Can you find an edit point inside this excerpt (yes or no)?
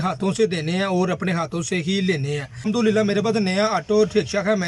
no